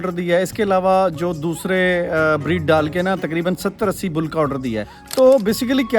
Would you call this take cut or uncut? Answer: cut